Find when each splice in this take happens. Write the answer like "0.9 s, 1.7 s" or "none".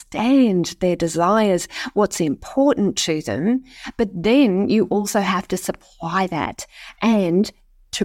none